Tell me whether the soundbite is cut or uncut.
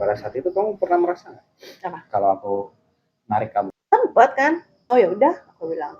cut